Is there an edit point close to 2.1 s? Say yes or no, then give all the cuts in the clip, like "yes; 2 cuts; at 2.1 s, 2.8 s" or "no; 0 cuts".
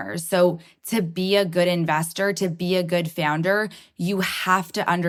no; 0 cuts